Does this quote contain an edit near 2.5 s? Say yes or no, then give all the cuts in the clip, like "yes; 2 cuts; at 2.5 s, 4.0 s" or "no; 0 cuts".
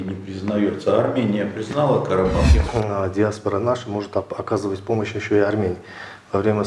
yes; 1 cut; at 2.5 s